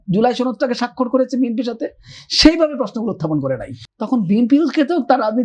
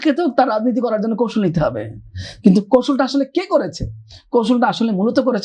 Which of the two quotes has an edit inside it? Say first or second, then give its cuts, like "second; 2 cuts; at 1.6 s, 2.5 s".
first; 1 cut; at 3.8 s